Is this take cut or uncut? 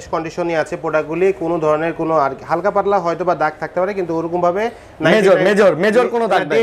uncut